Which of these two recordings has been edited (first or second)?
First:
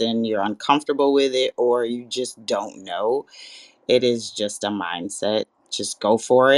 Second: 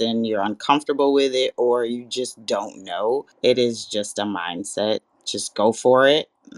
second